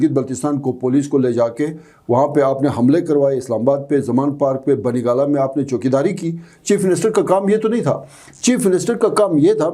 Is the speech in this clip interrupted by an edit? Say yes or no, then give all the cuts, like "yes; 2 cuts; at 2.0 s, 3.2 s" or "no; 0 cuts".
no; 0 cuts